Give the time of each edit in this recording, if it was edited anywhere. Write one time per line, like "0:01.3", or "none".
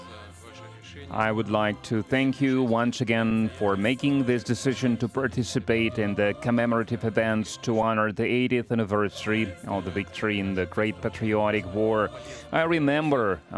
none